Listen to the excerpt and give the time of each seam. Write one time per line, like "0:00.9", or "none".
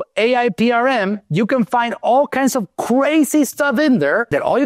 none